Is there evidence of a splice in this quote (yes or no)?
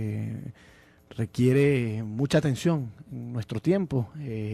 no